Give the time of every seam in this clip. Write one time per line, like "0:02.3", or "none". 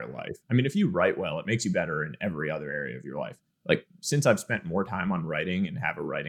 none

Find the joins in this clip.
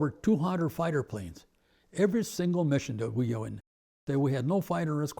0:04.0

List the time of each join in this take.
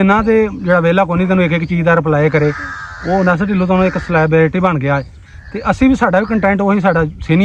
none

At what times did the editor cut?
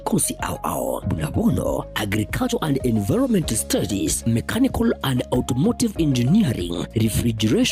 0:02.6

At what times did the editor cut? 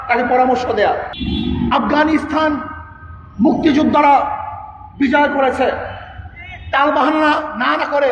0:01.1

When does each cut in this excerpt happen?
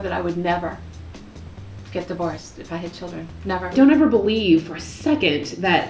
0:03.7

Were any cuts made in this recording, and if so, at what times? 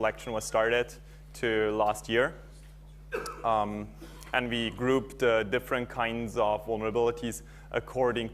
0:04.5

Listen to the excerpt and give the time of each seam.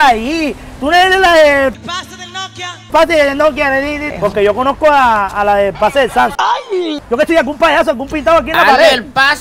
0:04.0
0:06.9

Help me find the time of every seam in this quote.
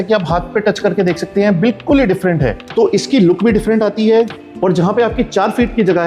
0:02.6

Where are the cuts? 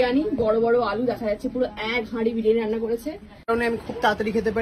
0:03.5

